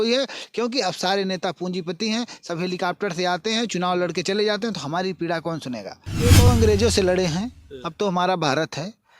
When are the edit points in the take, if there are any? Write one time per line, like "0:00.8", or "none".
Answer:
0:06.5